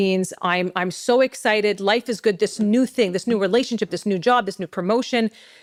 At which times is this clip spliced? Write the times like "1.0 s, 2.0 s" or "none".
none